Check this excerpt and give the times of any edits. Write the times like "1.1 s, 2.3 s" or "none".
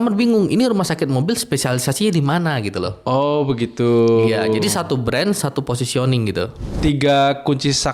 6.7 s